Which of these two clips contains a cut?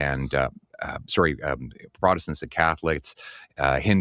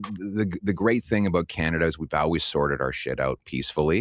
first; 1 cut; at 3.0 s

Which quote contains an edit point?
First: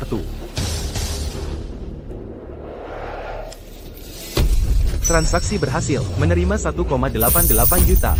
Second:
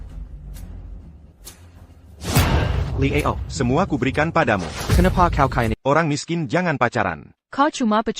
second; 1 cut; at 5.7 s

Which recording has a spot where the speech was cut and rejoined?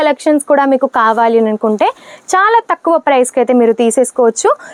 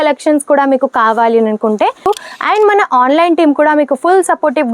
second; 1 cut; at 2.1 s

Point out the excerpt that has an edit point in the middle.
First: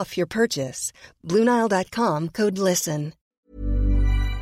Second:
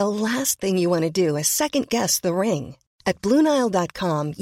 first; 1 cut; at 3.2 s

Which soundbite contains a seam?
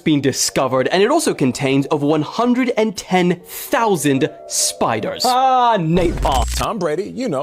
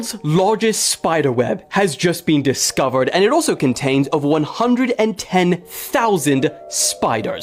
first; 1 cut; at 6.5 s

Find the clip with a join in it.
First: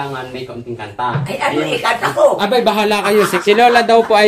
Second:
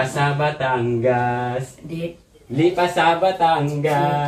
first; 1 cut; at 3.3 s

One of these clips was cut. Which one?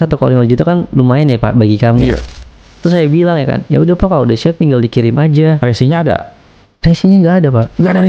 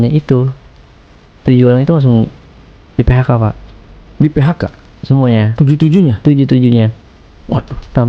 first; 1 cut; at 2.2 s

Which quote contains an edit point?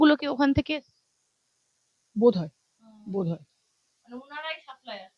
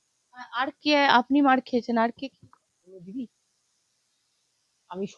second; 1 cut; at 2.8 s

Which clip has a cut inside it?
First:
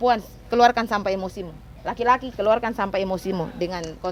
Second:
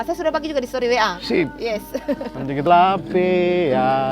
second; 1 cut; at 2.7 s

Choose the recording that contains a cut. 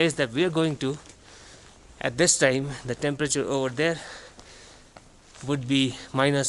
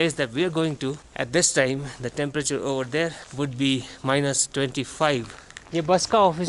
second; 3 cuts; at 1.1 s, 3.2 s, 5.5 s

